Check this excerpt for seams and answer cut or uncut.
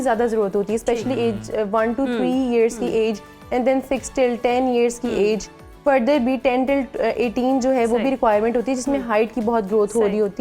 uncut